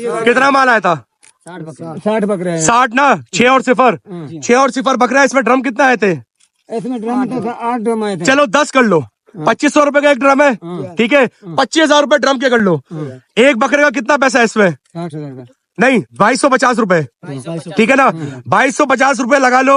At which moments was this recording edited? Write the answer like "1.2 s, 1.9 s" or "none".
none